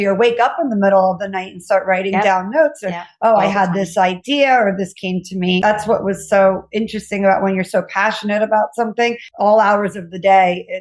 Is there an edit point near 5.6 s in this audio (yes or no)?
yes